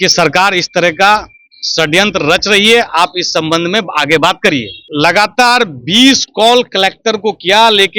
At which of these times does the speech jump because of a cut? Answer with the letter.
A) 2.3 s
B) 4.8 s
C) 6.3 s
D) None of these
B